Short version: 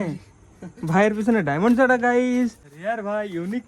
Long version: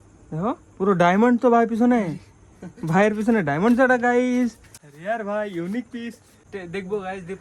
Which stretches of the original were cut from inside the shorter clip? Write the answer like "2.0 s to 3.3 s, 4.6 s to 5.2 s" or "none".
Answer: 4.7 s to 4.9 s